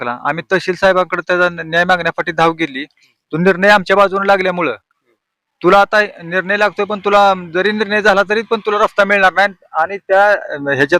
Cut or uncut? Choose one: uncut